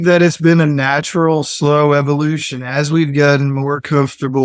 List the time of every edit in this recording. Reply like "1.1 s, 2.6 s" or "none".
none